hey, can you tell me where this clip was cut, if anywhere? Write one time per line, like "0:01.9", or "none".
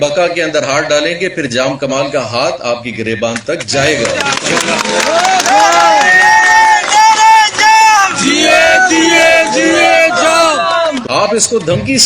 0:11.0